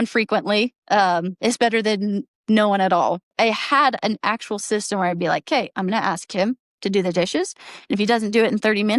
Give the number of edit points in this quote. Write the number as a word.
one